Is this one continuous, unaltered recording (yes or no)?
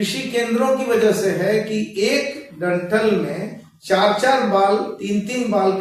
yes